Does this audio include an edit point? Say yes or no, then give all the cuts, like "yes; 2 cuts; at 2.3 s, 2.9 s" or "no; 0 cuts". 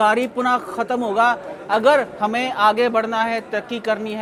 no; 0 cuts